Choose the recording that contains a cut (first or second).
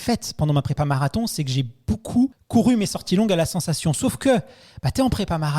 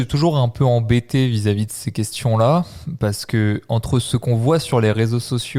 first